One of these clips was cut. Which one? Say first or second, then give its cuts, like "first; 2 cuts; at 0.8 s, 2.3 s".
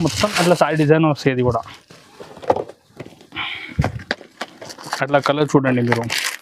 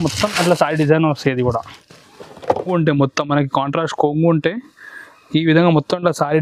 second; 1 cut; at 2.7 s